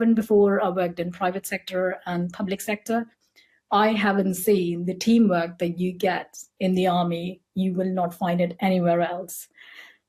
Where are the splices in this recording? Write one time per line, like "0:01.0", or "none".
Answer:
none